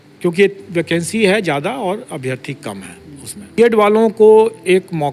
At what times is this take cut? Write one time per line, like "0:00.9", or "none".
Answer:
0:03.6